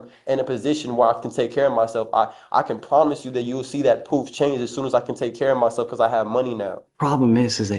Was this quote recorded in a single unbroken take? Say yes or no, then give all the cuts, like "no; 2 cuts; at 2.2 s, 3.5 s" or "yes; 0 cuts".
no; 1 cut; at 6.8 s